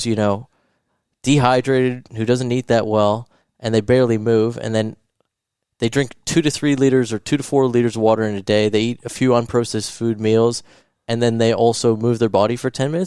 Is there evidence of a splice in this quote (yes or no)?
no